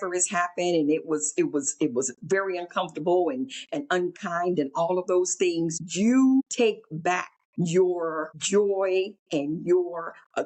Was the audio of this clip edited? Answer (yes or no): yes